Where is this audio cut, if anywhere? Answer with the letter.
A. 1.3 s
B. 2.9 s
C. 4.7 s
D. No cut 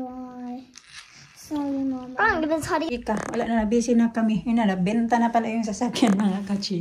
B